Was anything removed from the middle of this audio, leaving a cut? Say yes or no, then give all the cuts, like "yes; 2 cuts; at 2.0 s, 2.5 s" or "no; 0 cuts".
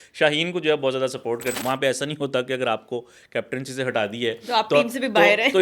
yes; 1 cut; at 1.5 s